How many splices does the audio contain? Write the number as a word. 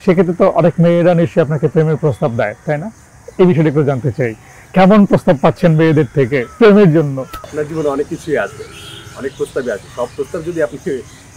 zero